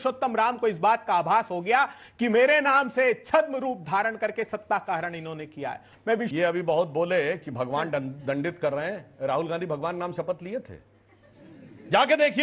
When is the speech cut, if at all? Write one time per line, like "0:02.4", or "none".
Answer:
0:06.3